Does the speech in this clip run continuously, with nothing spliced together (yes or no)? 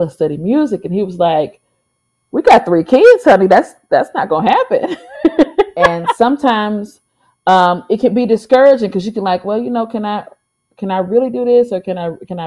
no